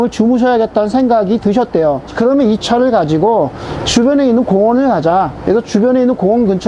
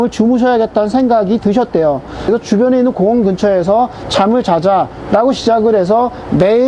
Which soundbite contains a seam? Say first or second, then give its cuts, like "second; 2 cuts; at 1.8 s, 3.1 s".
second; 1 cut; at 2.1 s